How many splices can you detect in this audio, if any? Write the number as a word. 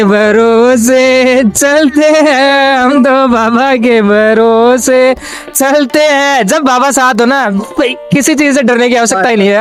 zero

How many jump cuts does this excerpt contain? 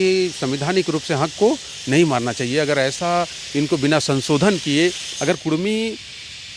zero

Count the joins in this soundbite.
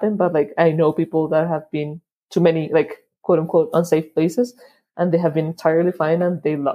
zero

